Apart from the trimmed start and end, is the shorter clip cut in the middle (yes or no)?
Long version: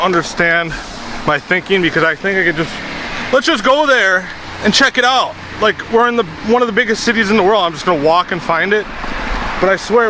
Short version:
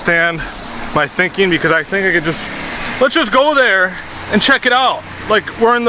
no